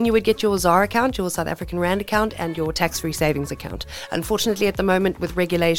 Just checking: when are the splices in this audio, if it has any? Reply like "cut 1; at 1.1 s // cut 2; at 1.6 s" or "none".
none